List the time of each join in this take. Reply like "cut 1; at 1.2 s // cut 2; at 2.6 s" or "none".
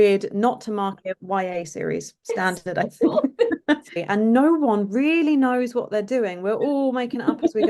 cut 1; at 4.0 s